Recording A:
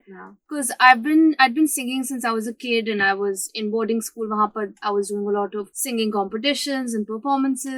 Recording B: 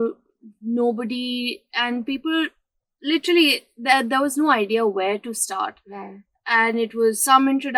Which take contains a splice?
A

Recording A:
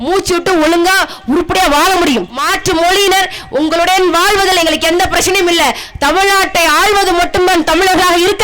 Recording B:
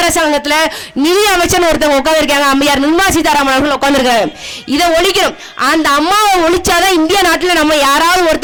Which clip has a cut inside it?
A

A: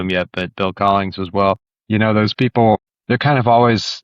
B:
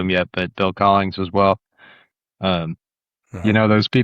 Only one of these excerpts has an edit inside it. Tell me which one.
A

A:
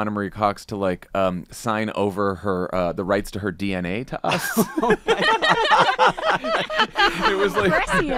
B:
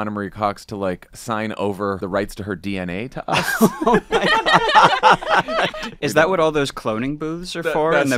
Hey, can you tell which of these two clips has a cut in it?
B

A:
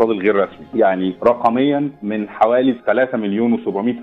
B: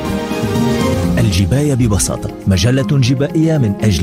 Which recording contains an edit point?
A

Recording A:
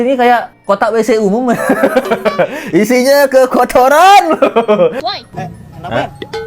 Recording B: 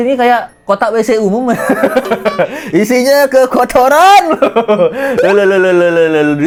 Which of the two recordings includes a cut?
A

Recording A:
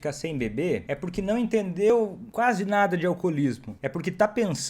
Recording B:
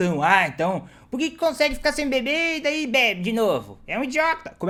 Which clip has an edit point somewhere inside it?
A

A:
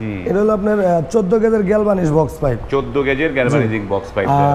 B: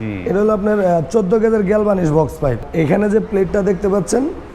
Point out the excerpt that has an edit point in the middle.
B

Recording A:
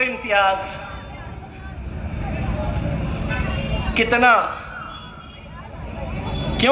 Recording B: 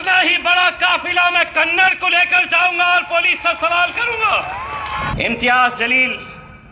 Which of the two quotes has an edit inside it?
B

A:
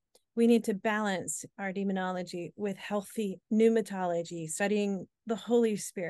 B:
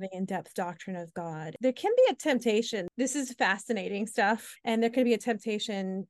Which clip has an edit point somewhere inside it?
B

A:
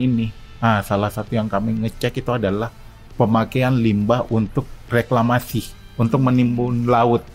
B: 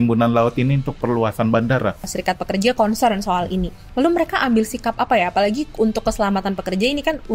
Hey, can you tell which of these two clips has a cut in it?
B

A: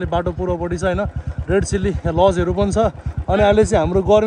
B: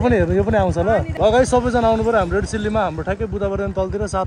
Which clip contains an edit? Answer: B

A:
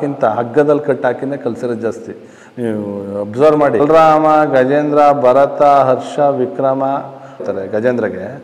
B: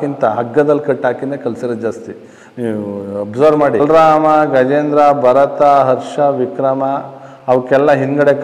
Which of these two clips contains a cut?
A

